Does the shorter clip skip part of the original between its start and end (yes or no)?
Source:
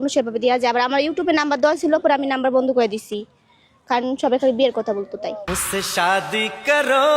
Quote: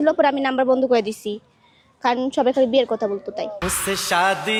no